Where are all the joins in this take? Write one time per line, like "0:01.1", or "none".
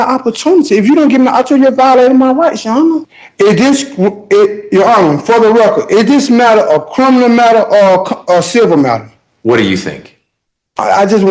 0:03.0

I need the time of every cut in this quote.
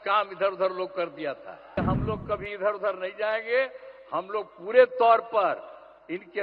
0:01.8

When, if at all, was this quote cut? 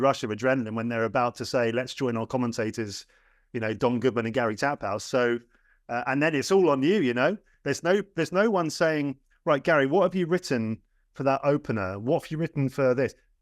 none

